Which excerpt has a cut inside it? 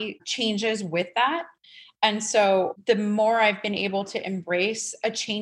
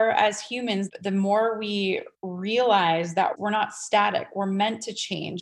second; 1 cut; at 0.9 s

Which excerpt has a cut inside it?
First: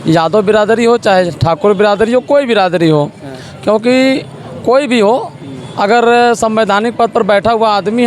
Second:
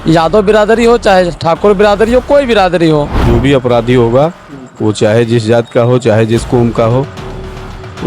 second; 1 cut; at 3.2 s

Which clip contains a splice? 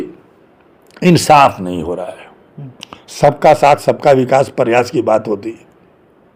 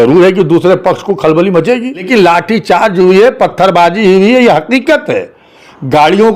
second; 1 cut; at 2.0 s

